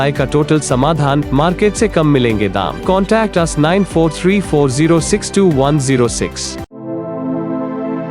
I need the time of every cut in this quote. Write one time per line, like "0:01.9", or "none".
none